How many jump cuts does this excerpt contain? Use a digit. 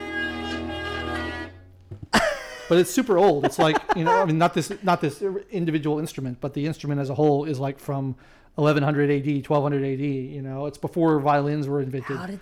0